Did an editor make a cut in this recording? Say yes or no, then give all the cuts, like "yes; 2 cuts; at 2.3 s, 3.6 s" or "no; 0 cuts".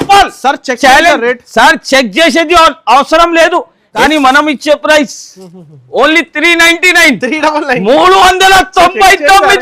yes; 1 cut; at 3.9 s